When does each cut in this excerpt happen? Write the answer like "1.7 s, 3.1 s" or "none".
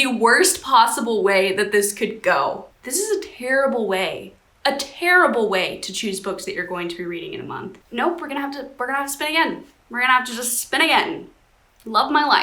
2.7 s, 7.7 s